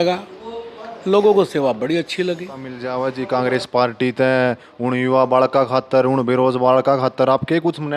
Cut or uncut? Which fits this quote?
cut